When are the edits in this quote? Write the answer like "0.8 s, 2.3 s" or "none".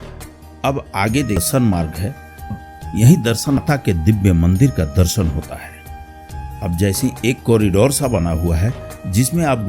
1.5 s, 2.6 s, 3.6 s